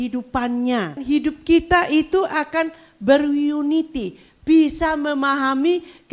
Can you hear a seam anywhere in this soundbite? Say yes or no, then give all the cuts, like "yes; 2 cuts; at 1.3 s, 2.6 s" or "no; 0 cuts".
yes; 1 cut; at 1.0 s